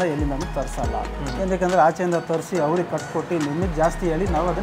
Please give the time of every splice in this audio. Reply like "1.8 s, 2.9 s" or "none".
none